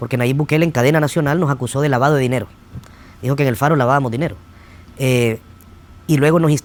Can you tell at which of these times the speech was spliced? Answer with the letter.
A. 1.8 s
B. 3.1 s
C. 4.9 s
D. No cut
D